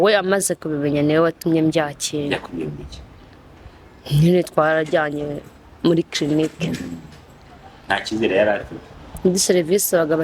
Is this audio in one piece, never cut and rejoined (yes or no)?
no